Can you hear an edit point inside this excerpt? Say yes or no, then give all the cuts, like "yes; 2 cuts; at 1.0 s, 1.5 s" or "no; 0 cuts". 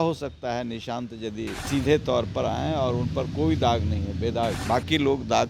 yes; 2 cuts; at 1.6 s, 4.6 s